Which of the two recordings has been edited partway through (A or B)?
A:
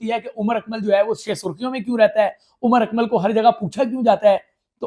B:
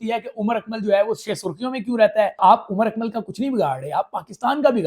B